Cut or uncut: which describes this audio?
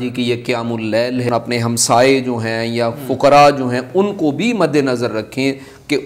cut